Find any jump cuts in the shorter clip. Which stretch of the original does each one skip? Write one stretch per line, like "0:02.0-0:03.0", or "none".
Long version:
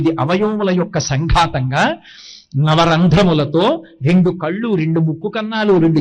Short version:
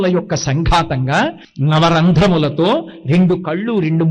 0:02.1-0:02.4